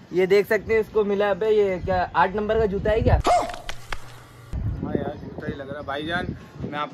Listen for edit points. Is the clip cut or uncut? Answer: uncut